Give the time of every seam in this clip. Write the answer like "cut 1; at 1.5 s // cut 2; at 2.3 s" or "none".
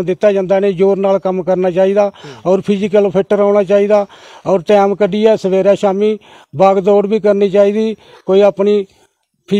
none